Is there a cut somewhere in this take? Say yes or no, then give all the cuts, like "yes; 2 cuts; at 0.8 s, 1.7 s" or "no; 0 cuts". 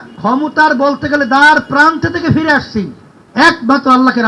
no; 0 cuts